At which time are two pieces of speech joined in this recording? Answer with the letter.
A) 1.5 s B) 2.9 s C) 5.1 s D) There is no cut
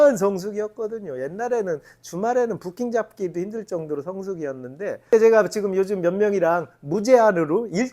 C